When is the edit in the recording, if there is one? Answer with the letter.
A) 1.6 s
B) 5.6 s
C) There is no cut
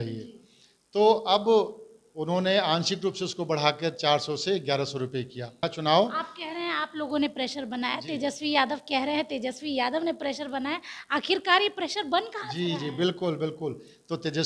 B